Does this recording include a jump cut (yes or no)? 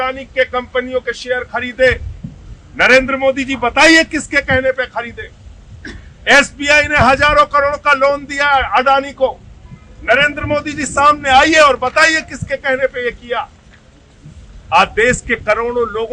no